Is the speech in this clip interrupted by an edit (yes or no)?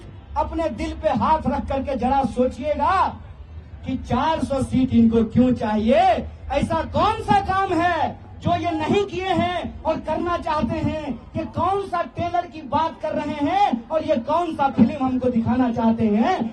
no